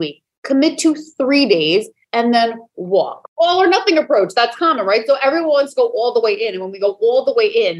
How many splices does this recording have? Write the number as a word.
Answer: one